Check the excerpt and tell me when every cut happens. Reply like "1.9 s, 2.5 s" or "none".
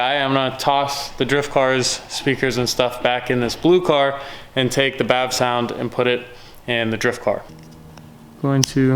7.4 s